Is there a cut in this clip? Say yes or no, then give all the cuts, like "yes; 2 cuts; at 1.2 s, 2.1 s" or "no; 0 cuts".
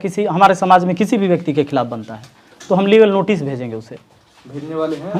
no; 0 cuts